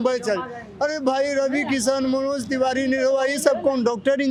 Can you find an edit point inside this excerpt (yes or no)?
no